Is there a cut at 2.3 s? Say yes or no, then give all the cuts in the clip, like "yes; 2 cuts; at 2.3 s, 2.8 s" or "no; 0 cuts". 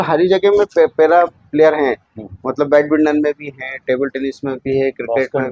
no; 0 cuts